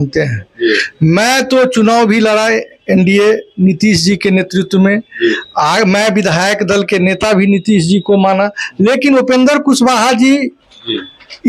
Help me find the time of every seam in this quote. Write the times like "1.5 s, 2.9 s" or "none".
none

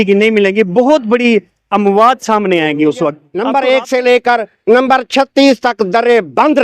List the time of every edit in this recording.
3.3 s

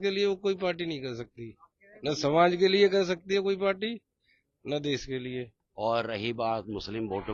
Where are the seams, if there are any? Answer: 5.6 s

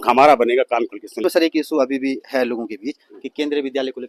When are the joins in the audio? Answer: 1.2 s

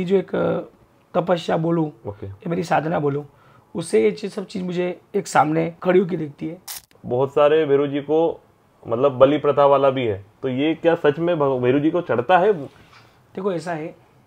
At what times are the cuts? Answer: 5.8 s, 6.9 s

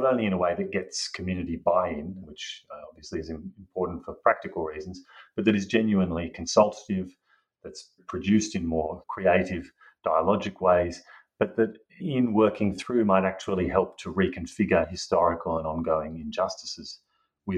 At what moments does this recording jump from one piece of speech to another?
2.2 s, 8.0 s, 9.0 s, 12.0 s

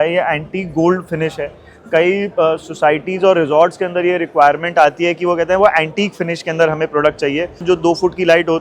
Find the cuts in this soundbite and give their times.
7.6 s

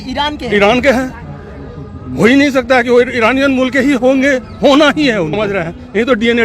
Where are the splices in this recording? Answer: 5.4 s

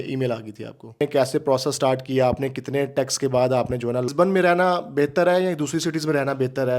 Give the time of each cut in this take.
1.0 s, 4.1 s

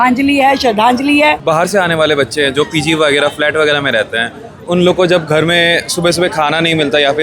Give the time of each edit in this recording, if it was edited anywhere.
1.4 s

